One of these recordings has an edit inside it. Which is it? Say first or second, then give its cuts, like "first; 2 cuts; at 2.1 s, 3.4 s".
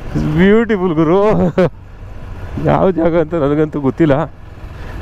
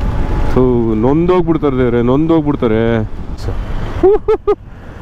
second; 1 cut; at 3.4 s